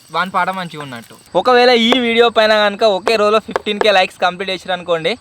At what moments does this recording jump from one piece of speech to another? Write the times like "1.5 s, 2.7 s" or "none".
1.1 s